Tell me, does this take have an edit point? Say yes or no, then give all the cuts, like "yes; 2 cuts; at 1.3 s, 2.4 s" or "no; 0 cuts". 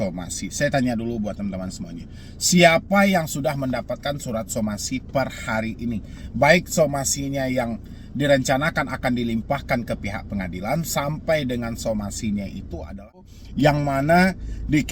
yes; 1 cut; at 13.4 s